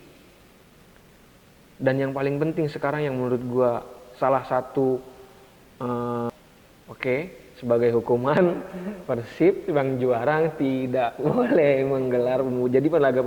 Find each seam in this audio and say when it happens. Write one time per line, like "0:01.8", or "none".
0:06.3